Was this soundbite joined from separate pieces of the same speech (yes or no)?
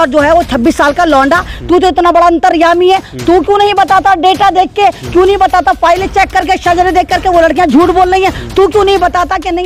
no